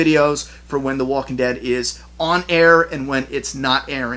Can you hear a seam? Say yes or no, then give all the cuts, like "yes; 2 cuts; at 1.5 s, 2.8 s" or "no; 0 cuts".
no; 0 cuts